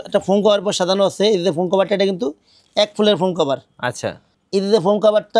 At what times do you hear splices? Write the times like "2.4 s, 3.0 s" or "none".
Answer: none